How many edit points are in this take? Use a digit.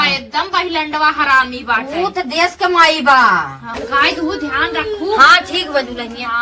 1